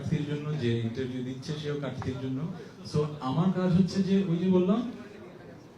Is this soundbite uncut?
yes; 0 cuts

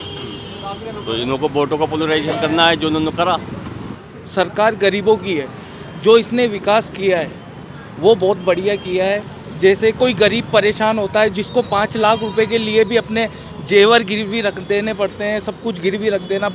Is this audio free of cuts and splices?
no; 1 cut; at 4.0 s

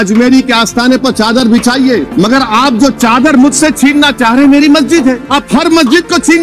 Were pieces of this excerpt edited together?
yes; 2 cuts; at 2.1 s, 5.2 s

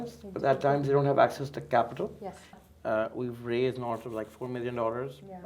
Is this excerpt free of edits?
no; 1 cut; at 2.5 s

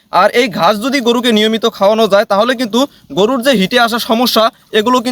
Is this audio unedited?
yes; 0 cuts

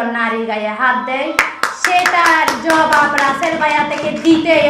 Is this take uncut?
yes; 0 cuts

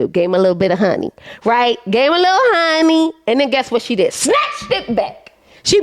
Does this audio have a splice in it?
no; 0 cuts

